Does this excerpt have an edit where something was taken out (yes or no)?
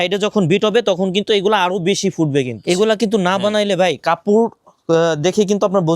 yes